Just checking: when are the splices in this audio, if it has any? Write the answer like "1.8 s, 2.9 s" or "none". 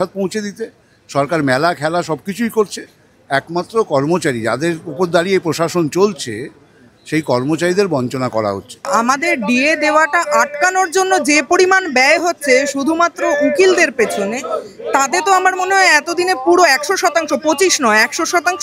8.8 s